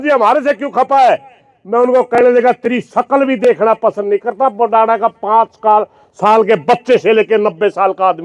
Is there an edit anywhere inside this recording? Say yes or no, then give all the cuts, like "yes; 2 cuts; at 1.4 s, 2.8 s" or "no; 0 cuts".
no; 0 cuts